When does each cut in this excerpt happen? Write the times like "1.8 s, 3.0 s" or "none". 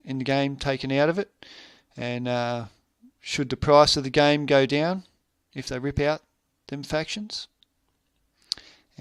none